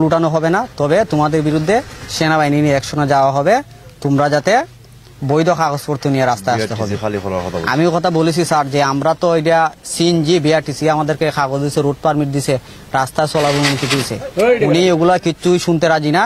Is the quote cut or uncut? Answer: uncut